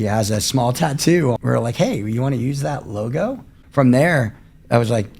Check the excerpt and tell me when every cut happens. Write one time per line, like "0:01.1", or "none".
0:01.4
0:03.6